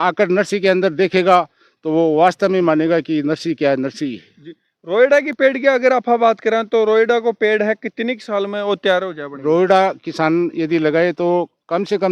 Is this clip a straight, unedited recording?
yes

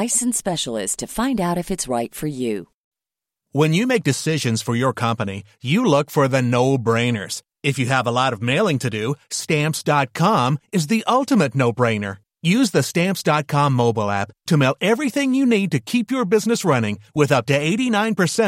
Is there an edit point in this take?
yes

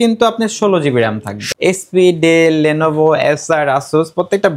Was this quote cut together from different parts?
yes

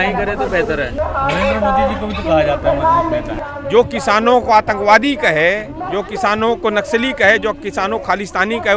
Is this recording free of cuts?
no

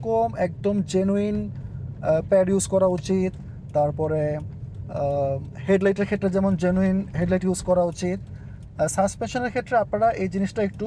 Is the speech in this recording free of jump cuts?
yes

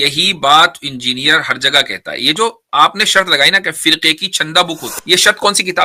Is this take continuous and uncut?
no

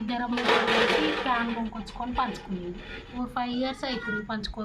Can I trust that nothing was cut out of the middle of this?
no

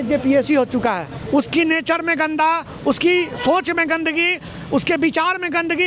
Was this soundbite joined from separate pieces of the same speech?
yes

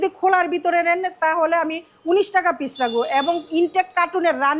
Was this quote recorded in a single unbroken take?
yes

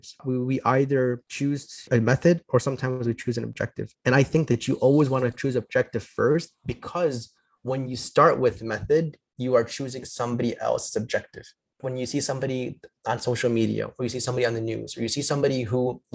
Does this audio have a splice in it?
yes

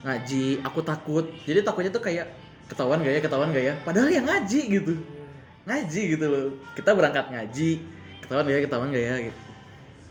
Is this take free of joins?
yes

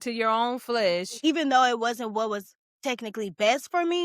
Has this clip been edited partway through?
yes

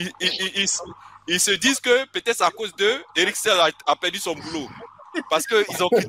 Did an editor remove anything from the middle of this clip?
no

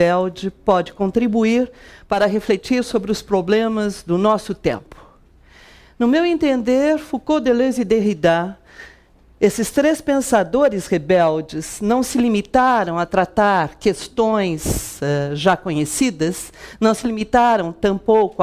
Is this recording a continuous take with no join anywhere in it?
no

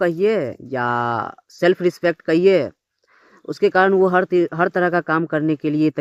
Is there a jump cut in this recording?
no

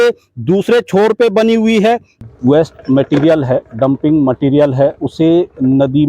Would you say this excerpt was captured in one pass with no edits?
no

